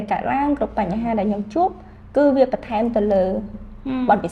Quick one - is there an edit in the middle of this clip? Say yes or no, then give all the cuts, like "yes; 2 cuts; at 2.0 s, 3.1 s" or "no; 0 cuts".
no; 0 cuts